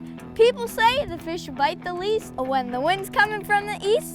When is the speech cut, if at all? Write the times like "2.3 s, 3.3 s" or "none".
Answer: 2.3 s